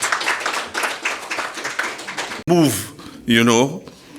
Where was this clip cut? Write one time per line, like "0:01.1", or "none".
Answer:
0:02.5